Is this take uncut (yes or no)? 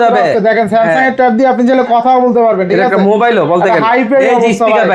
yes